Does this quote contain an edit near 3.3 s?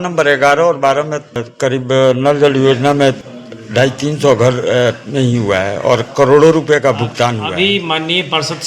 yes; 2 cuts; at 1.4 s, 3.3 s

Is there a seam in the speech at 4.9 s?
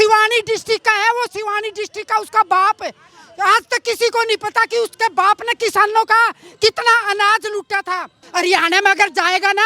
no; 1 cut; at 8.2 s

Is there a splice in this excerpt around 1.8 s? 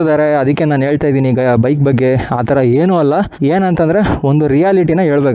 no; 1 cut; at 3.3 s

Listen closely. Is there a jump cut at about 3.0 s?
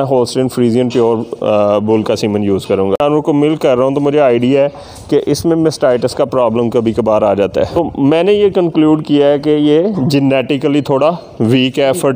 yes; 2 cuts; at 3.0 s, 7.7 s

